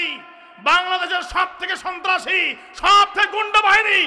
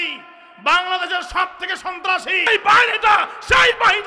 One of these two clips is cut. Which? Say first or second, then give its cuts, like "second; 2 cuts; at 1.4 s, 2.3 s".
second; 1 cut; at 2.5 s